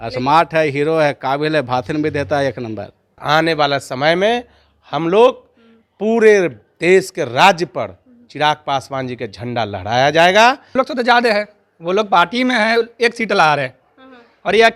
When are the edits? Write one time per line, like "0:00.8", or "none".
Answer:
0:03.2
0:10.7